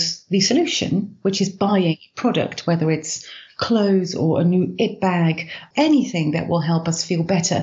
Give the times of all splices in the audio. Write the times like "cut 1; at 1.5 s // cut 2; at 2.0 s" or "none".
cut 1; at 5.6 s